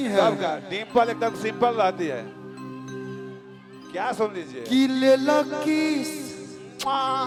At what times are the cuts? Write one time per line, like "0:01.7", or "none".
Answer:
none